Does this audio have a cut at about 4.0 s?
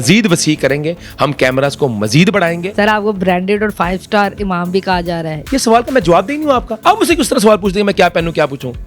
no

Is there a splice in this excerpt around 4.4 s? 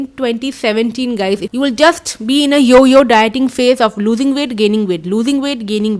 no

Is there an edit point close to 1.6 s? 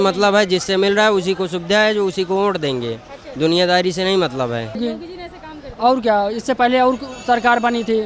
no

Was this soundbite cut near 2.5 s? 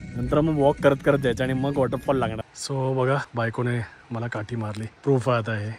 yes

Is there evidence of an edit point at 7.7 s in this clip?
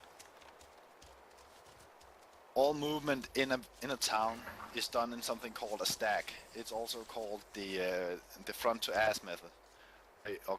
no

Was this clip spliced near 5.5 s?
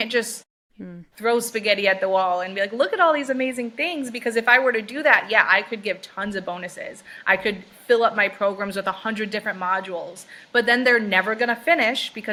no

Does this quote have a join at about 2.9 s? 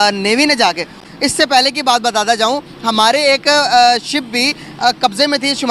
no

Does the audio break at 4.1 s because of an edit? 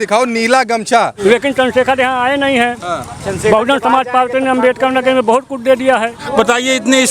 no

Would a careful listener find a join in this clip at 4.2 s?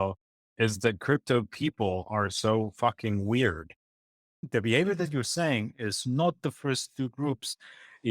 yes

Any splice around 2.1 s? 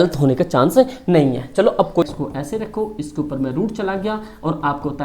yes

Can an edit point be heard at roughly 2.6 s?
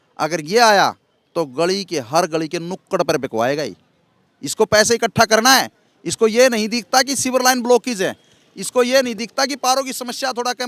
no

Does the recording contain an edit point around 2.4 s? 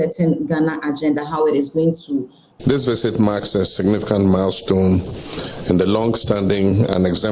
yes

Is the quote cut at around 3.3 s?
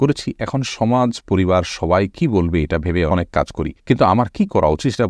yes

